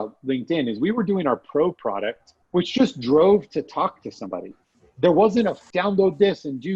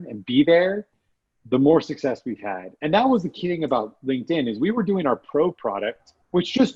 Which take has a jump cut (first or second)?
first